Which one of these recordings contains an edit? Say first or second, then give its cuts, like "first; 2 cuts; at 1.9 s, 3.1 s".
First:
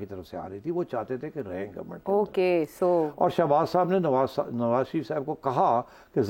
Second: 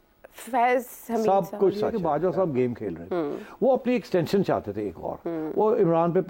second; 1 cut; at 1.9 s